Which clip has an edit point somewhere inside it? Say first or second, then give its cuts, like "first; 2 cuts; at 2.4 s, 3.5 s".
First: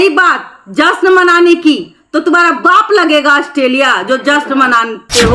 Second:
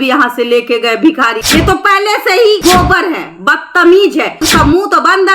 second; 2 cuts; at 1.4 s, 4.4 s